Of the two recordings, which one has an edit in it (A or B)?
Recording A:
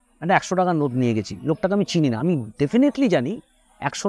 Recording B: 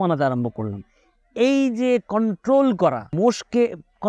B